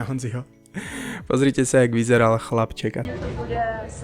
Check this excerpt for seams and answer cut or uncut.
cut